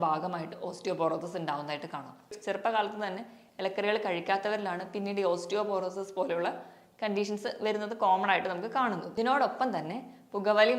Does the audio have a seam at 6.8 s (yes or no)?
no